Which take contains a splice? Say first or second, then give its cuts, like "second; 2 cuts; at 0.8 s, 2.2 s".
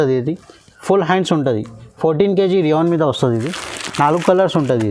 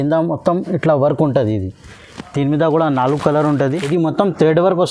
second; 1 cut; at 3.8 s